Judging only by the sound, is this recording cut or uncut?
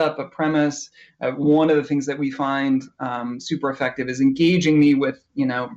uncut